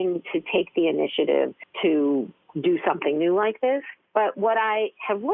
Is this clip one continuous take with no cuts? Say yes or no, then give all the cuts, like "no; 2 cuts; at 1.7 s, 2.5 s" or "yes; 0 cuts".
no; 3 cuts; at 1.6 s, 2.4 s, 4.0 s